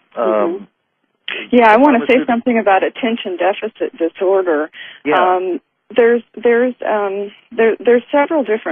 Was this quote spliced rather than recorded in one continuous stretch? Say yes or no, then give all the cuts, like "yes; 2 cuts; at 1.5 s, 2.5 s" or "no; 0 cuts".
yes; 1 cut; at 6.6 s